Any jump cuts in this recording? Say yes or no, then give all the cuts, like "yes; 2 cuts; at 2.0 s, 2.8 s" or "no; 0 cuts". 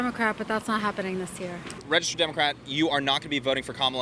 yes; 1 cut; at 1.6 s